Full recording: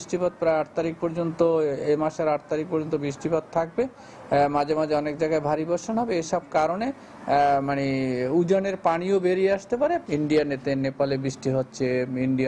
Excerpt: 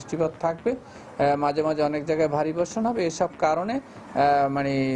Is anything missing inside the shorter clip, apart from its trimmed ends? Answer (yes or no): no